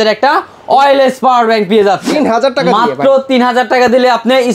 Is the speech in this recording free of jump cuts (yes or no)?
no